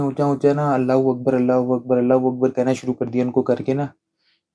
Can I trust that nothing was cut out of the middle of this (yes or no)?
yes